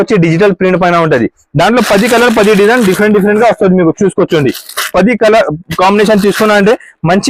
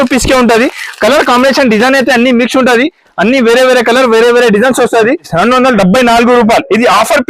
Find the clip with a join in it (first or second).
second